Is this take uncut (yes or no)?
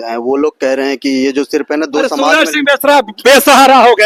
yes